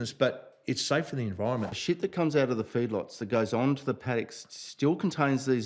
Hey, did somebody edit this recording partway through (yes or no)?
yes